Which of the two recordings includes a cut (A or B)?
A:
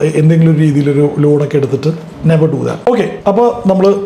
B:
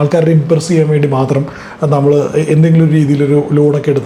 A